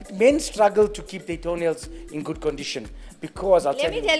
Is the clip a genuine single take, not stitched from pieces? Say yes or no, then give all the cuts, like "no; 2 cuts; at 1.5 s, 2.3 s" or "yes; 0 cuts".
yes; 0 cuts